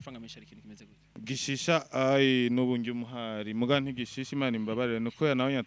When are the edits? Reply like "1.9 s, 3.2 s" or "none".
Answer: 0.9 s